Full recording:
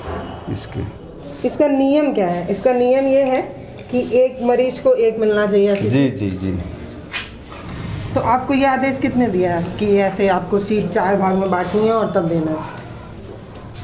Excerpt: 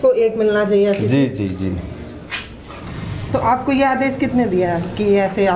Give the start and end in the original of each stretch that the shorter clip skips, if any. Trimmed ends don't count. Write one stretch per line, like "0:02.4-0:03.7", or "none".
none